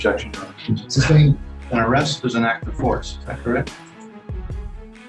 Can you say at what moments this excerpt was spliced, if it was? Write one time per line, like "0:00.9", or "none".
none